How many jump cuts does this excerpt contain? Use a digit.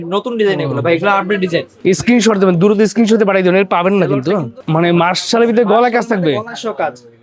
2